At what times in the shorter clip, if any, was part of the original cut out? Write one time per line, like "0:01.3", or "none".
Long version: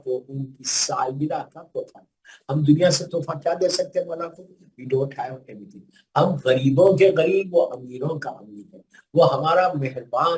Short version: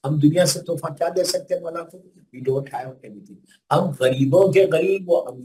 none